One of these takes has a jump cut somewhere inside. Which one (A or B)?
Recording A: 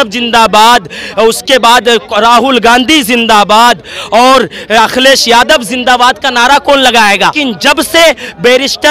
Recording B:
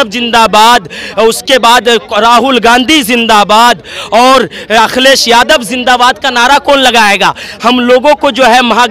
A